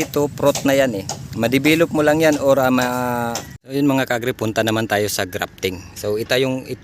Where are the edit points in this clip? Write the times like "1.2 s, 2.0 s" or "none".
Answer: 3.6 s